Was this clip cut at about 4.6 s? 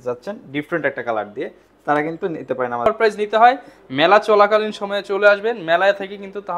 no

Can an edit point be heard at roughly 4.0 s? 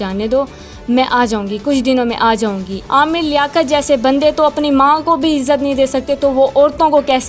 no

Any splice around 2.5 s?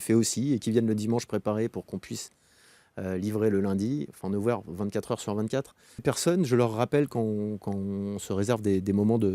no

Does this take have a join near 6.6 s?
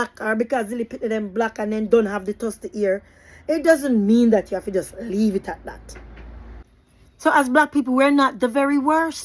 yes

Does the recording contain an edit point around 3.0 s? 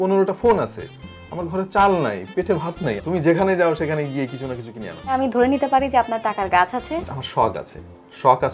yes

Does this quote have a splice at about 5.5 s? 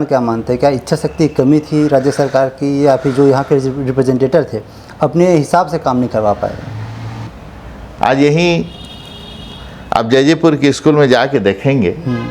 no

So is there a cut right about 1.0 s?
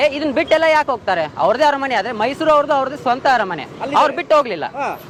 no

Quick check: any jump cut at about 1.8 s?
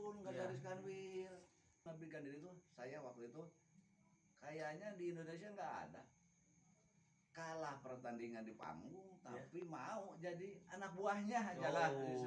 yes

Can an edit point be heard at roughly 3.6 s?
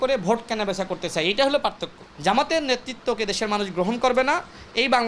no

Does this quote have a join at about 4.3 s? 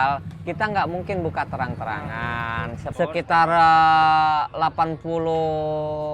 no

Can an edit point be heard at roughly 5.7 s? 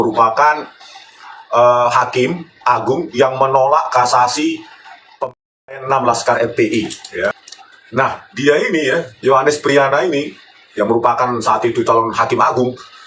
no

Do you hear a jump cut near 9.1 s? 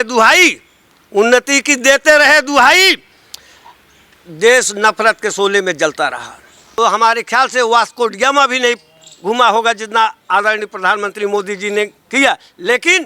no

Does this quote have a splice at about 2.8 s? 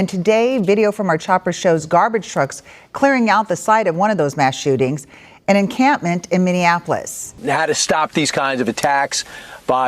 no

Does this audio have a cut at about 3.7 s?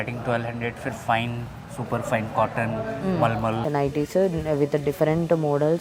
yes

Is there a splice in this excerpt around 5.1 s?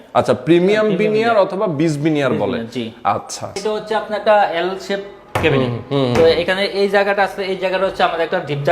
no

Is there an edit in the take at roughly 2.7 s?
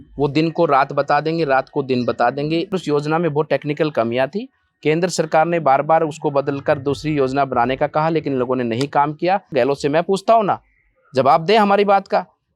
yes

